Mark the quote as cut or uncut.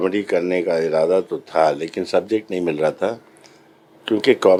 uncut